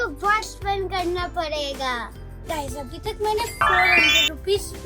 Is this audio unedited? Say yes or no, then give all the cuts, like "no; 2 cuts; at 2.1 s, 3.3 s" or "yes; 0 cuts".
yes; 0 cuts